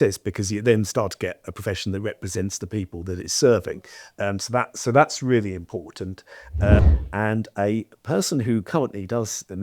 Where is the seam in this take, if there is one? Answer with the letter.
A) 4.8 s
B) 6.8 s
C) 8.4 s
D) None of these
B